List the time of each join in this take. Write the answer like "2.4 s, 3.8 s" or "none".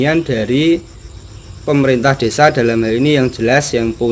none